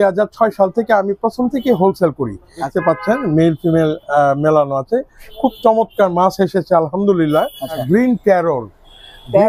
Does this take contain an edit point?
yes; 2 cuts; at 2.7 s, 7.8 s

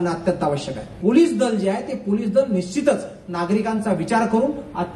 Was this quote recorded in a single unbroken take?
no; 1 cut; at 0.9 s

